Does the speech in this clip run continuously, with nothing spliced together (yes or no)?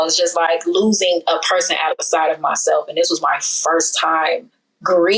yes